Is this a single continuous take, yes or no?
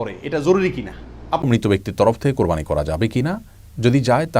no